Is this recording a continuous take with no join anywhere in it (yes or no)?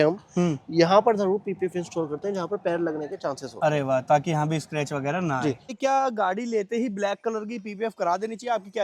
no